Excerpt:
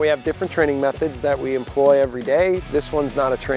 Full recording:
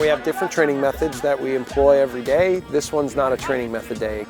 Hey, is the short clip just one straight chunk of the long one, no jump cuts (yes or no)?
yes